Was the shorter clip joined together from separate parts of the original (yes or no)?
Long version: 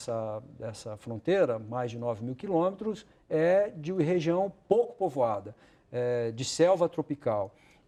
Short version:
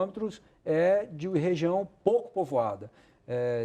no